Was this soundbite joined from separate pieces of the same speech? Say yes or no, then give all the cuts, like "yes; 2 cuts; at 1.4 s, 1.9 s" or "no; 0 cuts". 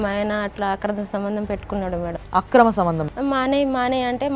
yes; 1 cut; at 3.0 s